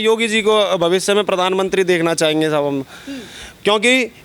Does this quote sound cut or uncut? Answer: uncut